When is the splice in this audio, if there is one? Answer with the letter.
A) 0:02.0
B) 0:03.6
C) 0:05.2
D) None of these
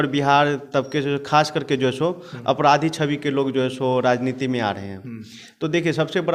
D